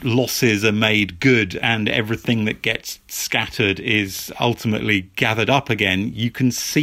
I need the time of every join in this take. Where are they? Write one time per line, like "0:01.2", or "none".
none